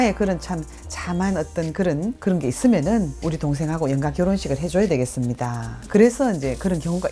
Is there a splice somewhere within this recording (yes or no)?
no